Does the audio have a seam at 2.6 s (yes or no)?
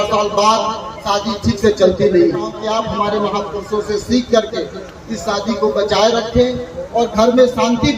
yes